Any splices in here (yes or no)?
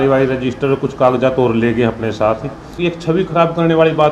yes